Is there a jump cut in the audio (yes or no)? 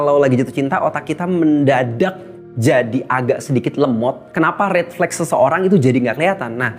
no